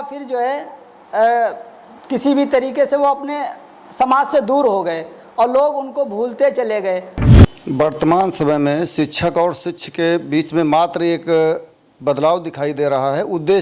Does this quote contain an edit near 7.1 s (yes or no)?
yes